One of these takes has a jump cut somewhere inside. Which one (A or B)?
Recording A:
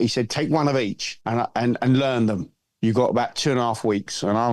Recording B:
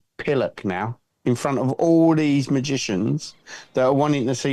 A